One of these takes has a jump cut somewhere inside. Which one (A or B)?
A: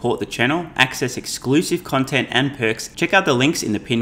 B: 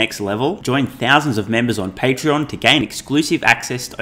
A